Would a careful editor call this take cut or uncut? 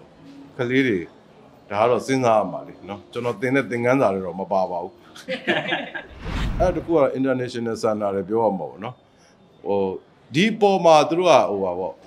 uncut